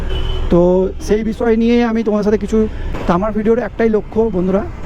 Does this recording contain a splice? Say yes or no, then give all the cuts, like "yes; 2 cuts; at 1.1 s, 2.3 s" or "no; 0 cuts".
yes; 1 cut; at 2.8 s